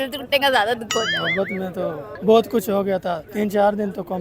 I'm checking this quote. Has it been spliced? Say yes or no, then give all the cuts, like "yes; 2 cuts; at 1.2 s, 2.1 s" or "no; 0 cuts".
yes; 2 cuts; at 2.1 s, 3.3 s